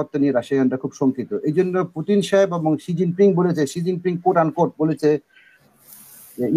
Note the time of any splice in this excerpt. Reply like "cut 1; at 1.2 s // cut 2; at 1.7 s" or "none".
none